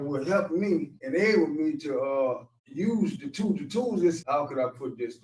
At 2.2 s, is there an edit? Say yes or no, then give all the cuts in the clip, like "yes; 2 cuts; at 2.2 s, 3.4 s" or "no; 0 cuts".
no; 1 cut; at 4.2 s